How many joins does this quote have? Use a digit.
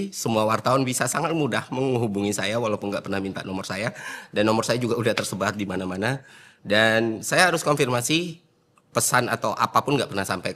0